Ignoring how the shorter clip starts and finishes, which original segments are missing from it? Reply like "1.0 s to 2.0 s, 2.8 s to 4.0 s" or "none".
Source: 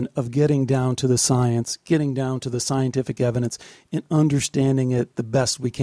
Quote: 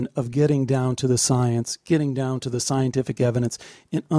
none

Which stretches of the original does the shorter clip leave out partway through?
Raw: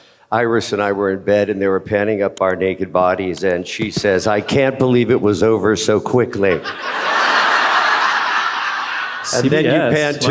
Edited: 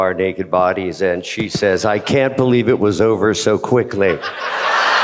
none

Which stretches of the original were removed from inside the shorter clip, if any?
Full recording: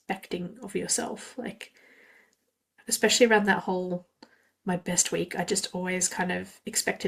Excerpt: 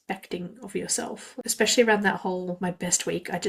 1.4 s to 2.9 s, 4.0 s to 4.6 s

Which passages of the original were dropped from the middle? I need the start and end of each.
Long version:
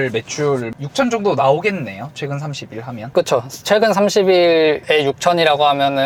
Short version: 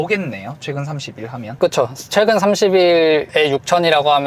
none

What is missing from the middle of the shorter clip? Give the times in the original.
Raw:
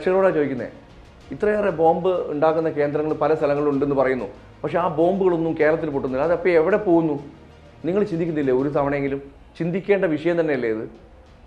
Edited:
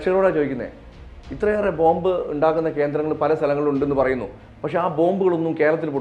none

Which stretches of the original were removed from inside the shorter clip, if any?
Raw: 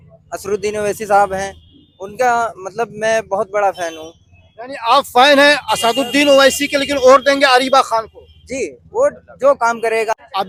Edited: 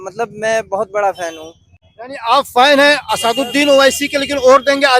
none

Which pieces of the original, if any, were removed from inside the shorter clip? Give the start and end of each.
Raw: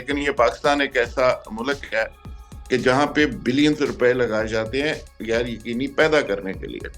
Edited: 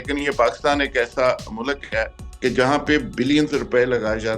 2.2 s to 2.5 s

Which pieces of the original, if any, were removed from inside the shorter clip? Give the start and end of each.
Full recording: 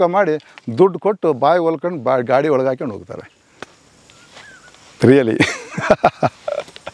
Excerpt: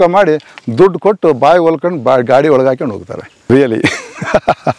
3.5 s to 5.1 s

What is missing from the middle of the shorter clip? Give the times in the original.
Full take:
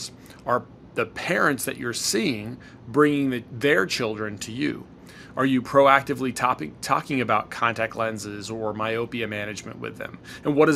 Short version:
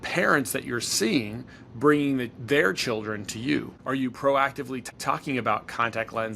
4.9 s to 5.3 s, 6.4 s to 6.7 s

